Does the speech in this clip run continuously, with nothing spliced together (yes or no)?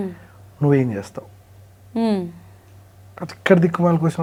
yes